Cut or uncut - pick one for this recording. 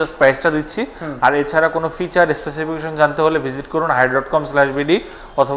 uncut